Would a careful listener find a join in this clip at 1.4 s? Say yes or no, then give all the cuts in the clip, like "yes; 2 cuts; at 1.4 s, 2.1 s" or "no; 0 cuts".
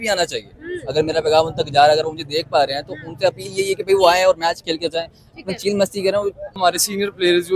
no; 1 cut; at 6.6 s